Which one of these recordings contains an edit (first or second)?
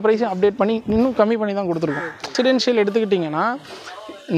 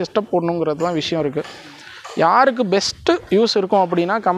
first